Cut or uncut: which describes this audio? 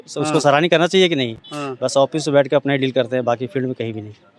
uncut